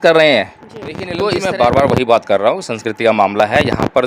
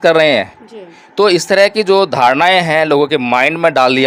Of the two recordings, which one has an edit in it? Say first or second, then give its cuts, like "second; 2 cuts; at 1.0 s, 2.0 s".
first; 1 cut; at 1.1 s